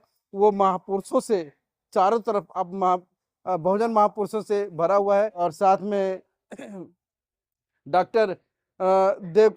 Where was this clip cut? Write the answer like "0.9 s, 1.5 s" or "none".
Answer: 5.4 s